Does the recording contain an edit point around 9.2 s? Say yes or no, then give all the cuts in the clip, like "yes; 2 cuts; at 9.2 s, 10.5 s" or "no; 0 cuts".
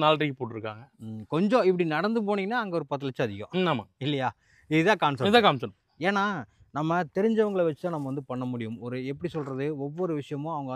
no; 0 cuts